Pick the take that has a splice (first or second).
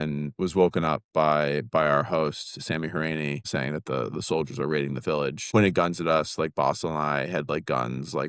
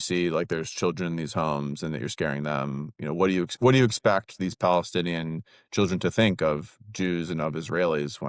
first